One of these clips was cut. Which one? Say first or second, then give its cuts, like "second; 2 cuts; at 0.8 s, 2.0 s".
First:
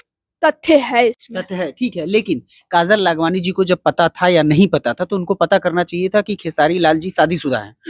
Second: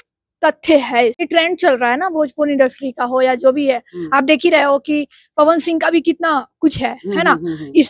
second; 1 cut; at 1.2 s